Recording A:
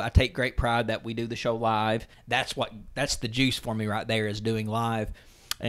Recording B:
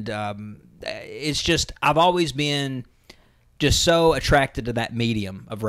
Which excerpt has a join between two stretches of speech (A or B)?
A